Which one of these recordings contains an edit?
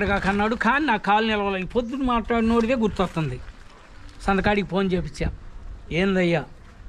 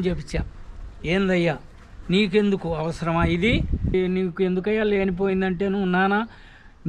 second; 1 cut; at 3.9 s

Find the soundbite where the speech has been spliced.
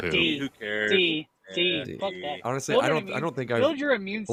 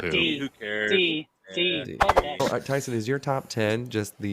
second; 1 cut; at 2.4 s

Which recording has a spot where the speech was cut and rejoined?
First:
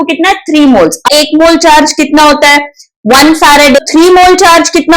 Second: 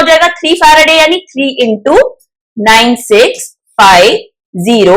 first; 2 cuts; at 1.1 s, 3.8 s

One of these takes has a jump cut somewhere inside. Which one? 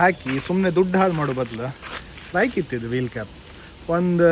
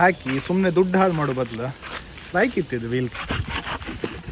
second; 1 cut; at 3.2 s

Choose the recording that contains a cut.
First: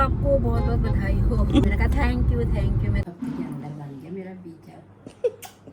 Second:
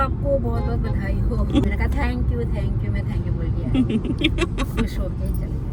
first; 1 cut; at 3.0 s

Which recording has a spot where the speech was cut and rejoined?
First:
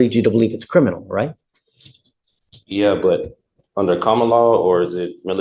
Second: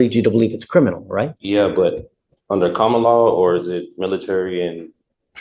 second; 1 cut; at 1.4 s

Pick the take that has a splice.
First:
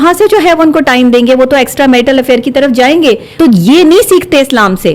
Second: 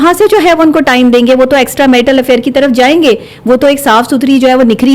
first; 1 cut; at 3.3 s

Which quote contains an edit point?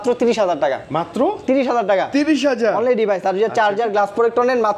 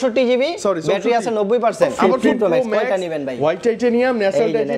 second; 1 cut; at 1.9 s

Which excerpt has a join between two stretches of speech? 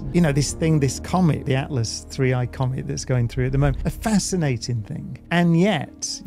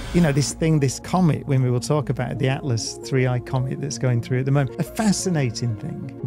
first; 2 cuts; at 1.4 s, 5.2 s

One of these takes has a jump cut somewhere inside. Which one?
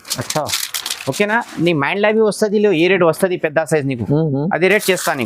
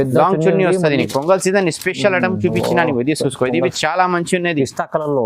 second; 1 cut; at 1.1 s

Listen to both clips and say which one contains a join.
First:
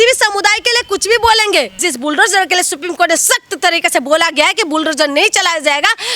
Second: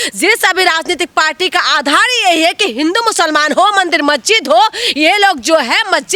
first; 1 cut; at 1.8 s

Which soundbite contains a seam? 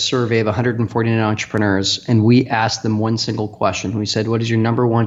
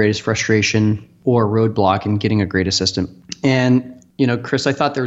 second; 3 cuts; at 1.1 s, 3.2 s, 4.0 s

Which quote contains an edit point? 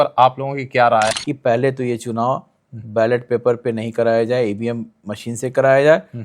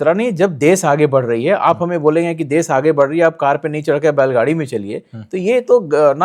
first; 1 cut; at 1.2 s

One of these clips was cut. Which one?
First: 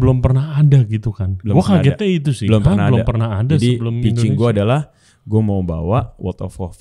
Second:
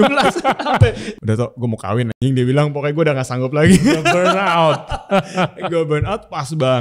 second; 1 cut; at 1.1 s

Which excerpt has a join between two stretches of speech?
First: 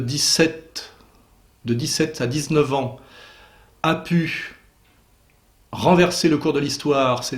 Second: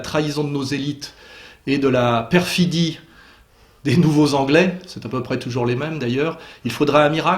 first; 1 cut; at 2.4 s

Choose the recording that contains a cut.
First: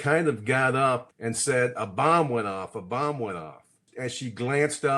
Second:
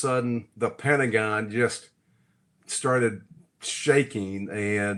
first; 2 cuts; at 1.1 s, 3.9 s

